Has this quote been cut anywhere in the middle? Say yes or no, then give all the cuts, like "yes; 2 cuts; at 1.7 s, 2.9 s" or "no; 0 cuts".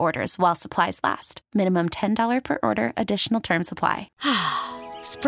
yes; 1 cut; at 4.1 s